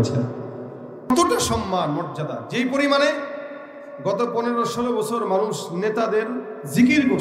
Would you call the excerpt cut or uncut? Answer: cut